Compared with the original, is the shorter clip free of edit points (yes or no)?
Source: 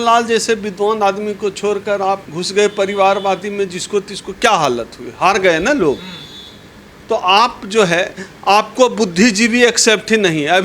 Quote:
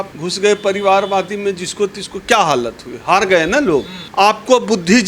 no